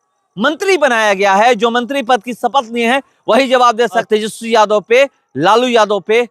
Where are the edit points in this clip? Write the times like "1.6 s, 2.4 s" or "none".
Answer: 4.1 s